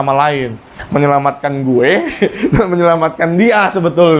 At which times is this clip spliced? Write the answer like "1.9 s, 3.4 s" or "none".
none

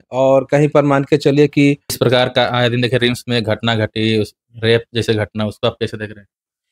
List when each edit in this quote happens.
2.0 s

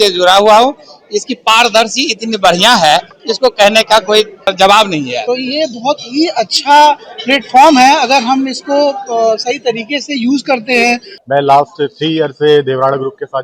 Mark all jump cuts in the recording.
4.4 s, 5.2 s, 11.1 s

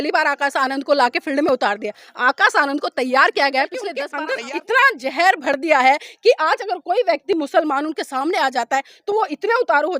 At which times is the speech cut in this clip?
4.1 s

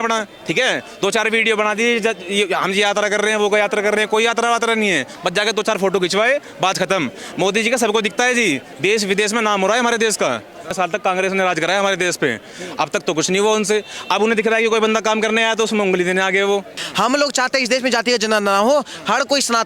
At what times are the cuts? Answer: 10.7 s, 16.8 s

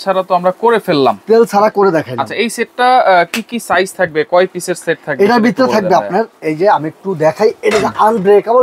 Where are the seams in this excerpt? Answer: none

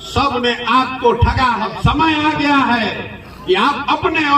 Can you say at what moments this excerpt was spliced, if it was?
1.7 s

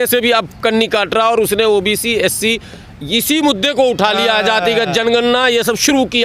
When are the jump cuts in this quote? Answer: none

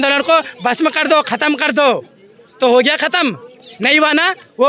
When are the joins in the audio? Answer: none

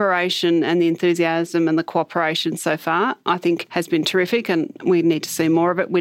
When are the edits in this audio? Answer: 3.7 s

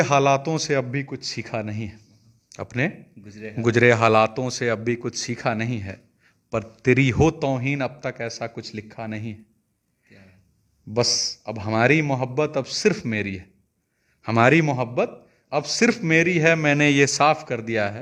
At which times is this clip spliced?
none

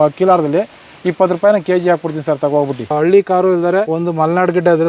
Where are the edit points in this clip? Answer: 2.9 s, 3.9 s

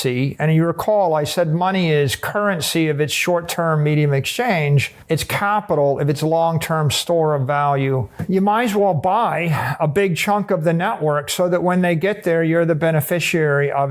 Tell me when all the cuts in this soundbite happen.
4.9 s, 8.2 s

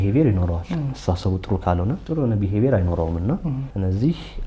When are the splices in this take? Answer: 2.0 s, 3.7 s

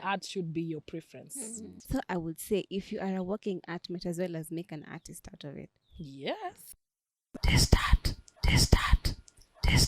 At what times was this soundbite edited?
1.7 s, 6.8 s

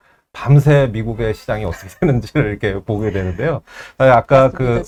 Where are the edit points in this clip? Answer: none

